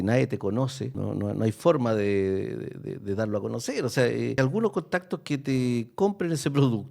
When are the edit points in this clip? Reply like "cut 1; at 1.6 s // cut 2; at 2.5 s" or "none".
cut 1; at 0.9 s // cut 2; at 4.4 s